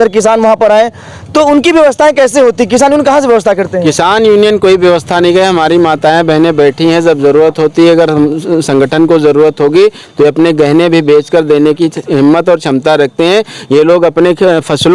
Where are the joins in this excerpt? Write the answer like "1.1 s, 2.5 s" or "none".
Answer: none